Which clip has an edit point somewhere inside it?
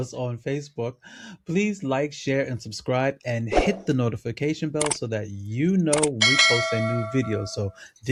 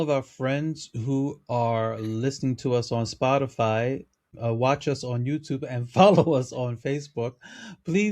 second; 1 cut; at 4.3 s

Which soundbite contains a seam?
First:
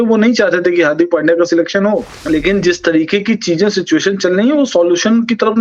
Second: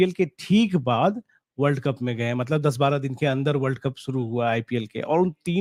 first; 1 cut; at 2.1 s

